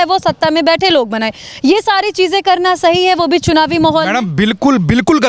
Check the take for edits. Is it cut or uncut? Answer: uncut